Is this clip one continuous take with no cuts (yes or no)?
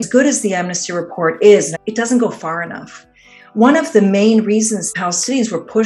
no